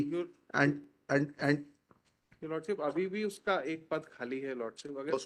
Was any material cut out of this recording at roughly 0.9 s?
yes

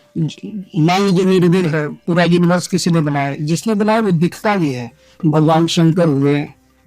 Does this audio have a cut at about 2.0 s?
no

